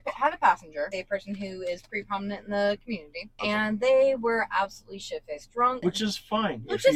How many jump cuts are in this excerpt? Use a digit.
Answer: 2